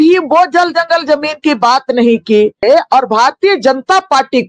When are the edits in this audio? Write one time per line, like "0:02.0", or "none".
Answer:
0:02.6